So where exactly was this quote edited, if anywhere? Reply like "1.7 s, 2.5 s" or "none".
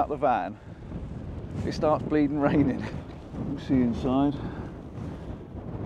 2.9 s